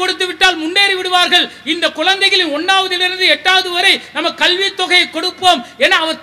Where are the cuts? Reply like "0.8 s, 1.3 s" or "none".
none